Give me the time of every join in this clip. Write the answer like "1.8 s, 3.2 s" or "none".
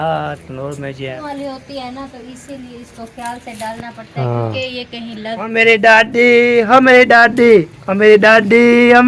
1.2 s, 5.4 s